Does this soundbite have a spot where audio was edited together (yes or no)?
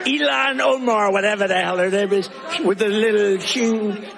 yes